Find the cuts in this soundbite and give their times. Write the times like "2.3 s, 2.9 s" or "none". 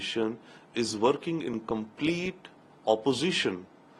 none